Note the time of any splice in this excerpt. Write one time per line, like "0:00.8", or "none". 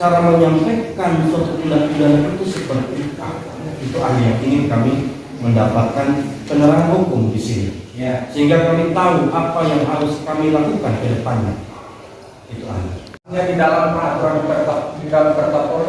none